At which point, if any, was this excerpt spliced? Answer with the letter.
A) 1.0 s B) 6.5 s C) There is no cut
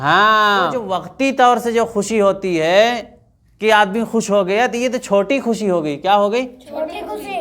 A